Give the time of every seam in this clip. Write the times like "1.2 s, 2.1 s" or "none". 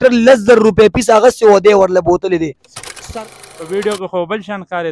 3.1 s